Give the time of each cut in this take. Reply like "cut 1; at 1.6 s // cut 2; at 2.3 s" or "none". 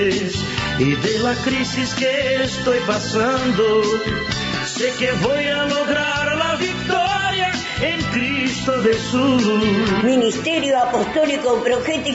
none